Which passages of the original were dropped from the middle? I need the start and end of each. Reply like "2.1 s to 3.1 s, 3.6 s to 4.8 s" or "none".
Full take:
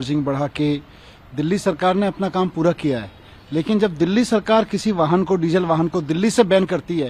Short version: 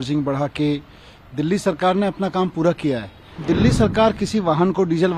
3.4 s to 3.9 s